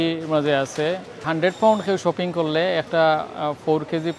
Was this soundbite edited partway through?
yes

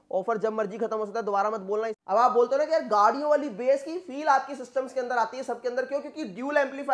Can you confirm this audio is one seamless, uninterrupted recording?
no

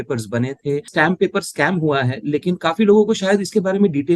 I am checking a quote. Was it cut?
yes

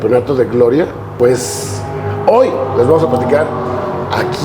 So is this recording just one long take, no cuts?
yes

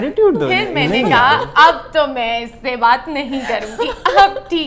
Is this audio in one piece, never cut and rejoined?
yes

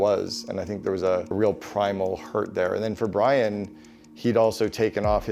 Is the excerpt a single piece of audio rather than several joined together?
no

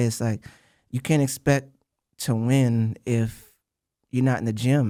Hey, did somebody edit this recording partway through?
no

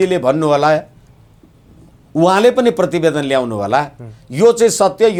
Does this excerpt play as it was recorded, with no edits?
yes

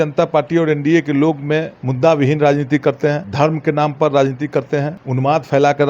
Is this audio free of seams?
no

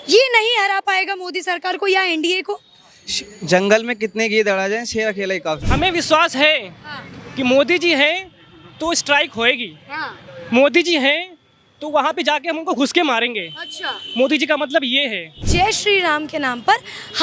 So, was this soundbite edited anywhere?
yes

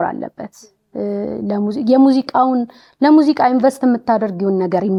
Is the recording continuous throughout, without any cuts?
yes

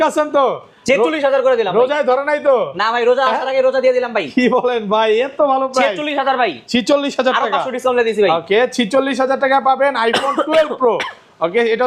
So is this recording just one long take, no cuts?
yes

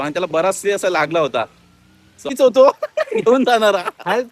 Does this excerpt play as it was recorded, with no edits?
no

